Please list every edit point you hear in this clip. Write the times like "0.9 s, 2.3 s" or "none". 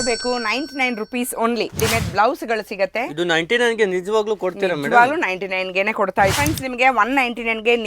1.8 s, 6.3 s